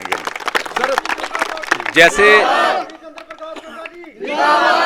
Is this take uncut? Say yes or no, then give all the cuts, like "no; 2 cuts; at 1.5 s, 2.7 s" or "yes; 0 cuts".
yes; 0 cuts